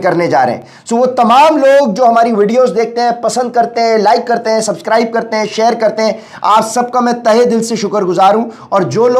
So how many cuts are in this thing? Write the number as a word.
zero